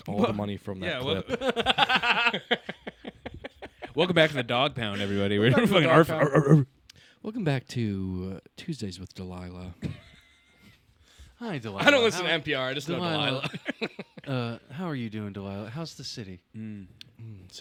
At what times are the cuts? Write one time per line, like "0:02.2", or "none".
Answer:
none